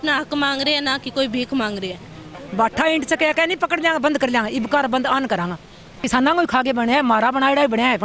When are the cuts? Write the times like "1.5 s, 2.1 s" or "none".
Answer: 2.3 s, 6.0 s